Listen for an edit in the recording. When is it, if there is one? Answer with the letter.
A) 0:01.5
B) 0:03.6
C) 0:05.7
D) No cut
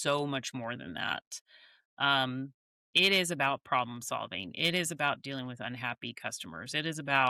D